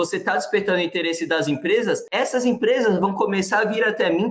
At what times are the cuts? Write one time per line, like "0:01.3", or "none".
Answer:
none

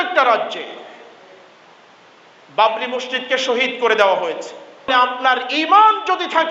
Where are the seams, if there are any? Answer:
0:04.9

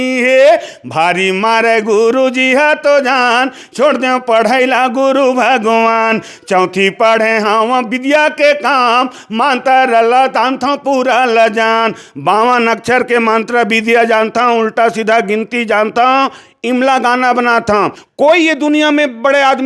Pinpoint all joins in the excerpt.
0:18.0

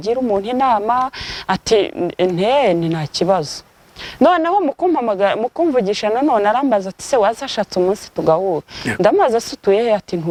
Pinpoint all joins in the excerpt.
none

